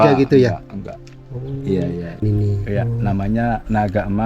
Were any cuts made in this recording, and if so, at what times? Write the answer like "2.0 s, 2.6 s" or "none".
2.2 s